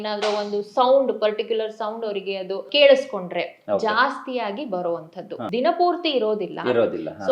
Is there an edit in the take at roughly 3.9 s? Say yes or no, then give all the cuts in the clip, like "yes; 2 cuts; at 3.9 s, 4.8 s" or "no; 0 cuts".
no; 2 cuts; at 2.7 s, 5.3 s